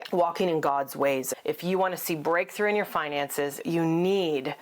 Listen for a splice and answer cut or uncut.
cut